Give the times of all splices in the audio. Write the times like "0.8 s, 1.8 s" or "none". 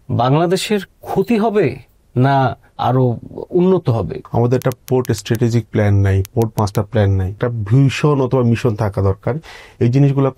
2.7 s, 4.2 s, 6.2 s, 7.3 s